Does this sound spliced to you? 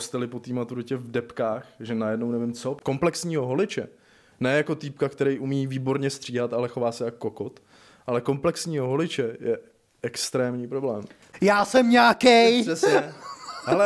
yes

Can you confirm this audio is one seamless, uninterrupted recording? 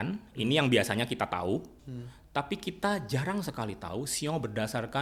yes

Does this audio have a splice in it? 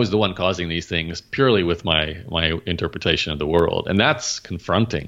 no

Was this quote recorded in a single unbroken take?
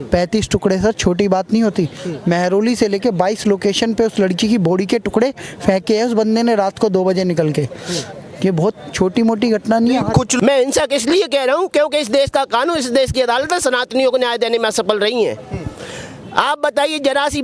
no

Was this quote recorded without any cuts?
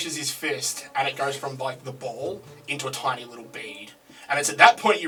yes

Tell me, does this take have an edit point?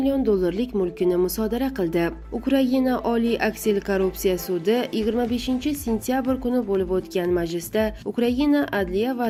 no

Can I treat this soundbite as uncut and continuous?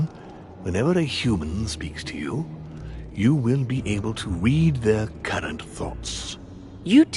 no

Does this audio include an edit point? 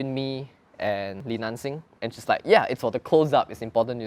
yes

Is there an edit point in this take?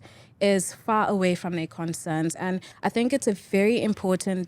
yes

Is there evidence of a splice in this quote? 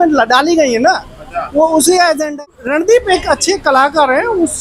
yes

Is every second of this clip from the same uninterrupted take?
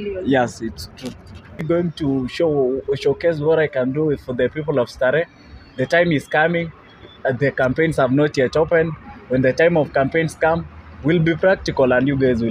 no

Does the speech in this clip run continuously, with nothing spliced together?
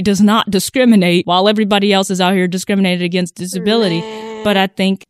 no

